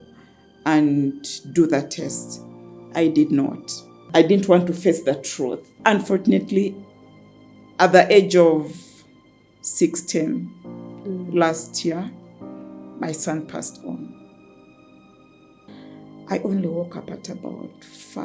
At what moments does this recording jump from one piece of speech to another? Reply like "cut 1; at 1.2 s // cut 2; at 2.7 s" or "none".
cut 1; at 4.0 s // cut 2; at 5.7 s // cut 3; at 15.7 s